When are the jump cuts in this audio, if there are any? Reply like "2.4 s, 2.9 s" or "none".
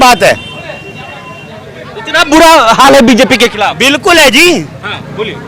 none